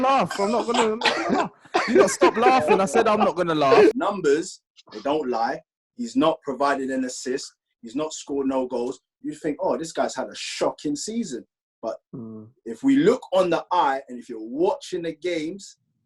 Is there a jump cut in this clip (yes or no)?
yes